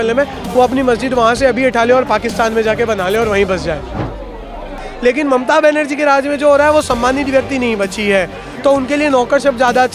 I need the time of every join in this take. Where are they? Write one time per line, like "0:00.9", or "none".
0:04.8